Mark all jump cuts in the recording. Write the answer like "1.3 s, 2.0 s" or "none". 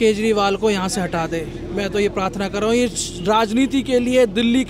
none